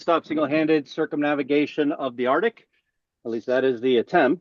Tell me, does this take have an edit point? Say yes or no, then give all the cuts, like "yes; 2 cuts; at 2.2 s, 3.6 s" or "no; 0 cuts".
no; 0 cuts